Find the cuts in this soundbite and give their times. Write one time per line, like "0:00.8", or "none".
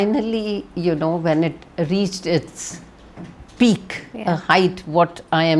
none

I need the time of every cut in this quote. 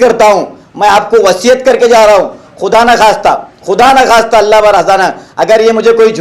none

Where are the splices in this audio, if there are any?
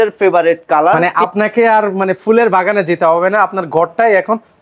0:01.1

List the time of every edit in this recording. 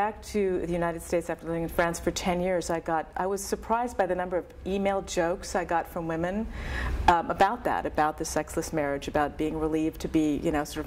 none

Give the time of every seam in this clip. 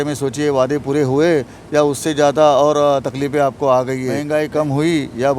0:04.2

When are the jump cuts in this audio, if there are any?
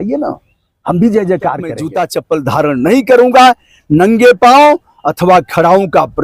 0:01.8

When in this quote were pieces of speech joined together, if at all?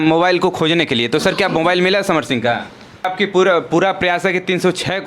0:03.1

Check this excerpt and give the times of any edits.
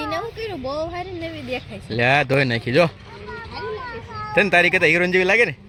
none

